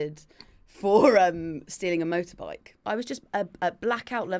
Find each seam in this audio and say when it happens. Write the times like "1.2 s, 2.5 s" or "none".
2.8 s